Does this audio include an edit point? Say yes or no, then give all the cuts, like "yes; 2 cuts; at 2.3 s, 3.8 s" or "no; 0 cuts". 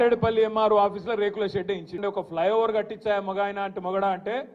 yes; 1 cut; at 2.0 s